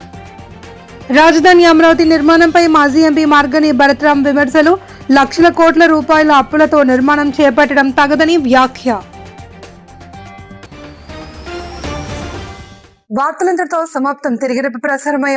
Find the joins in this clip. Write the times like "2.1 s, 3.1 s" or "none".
none